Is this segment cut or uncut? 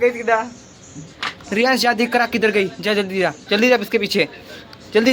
uncut